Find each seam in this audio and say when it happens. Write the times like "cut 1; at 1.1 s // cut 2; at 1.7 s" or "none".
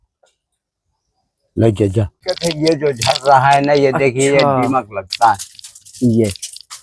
cut 1; at 2.2 s